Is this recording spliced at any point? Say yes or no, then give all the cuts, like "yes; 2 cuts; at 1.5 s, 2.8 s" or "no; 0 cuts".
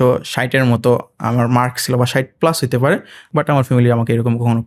yes; 1 cut; at 3.3 s